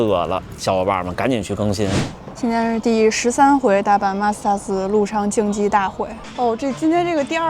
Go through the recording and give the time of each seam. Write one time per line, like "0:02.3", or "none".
0:02.1
0:06.2